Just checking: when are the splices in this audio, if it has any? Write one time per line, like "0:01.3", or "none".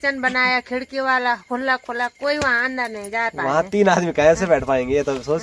none